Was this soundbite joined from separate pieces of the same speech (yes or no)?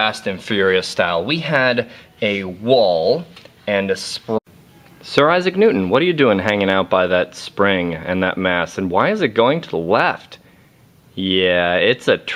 no